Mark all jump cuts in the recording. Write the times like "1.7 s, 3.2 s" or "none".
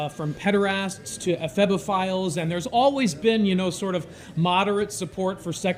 none